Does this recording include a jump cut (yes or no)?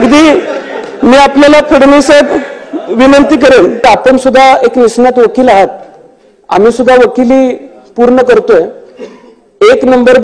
yes